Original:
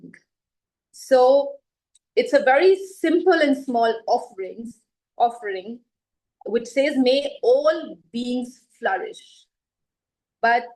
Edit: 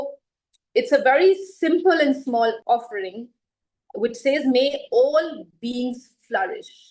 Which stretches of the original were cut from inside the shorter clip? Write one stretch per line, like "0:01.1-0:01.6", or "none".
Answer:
0:04.0-0:05.1